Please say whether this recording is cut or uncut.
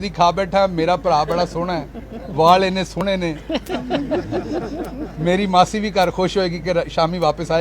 uncut